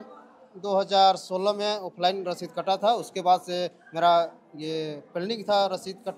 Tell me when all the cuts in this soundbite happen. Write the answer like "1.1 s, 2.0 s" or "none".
none